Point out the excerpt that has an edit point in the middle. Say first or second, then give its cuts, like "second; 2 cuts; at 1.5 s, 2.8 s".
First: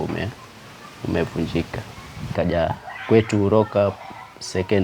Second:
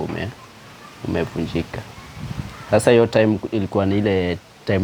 first; 1 cut; at 2.3 s